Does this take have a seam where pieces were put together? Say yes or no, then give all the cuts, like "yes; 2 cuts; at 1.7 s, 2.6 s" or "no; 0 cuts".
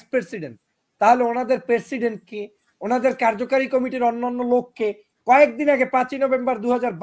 no; 0 cuts